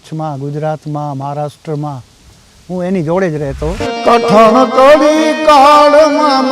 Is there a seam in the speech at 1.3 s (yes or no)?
no